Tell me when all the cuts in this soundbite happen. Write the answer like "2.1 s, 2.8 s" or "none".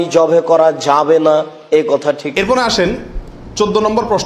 2.3 s